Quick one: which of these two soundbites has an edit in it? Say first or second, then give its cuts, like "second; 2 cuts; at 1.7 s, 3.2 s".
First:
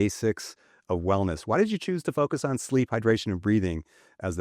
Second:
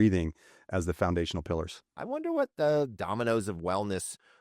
second; 1 cut; at 2.0 s